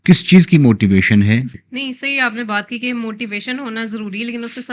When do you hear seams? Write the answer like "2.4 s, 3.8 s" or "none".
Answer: 1.5 s